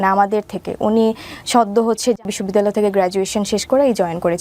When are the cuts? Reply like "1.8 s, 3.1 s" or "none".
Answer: 2.3 s